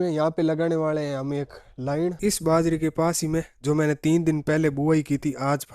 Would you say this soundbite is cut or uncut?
cut